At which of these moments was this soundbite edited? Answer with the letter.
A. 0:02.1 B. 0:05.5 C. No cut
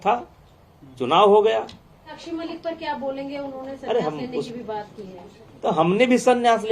A